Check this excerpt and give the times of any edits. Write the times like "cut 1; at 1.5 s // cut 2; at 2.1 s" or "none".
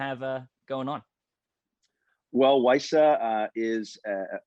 none